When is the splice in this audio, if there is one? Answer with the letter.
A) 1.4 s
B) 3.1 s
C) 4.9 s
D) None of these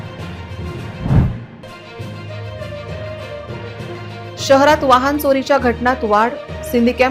A